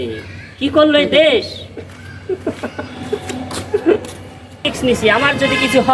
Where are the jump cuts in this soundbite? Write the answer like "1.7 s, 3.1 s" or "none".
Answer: 4.7 s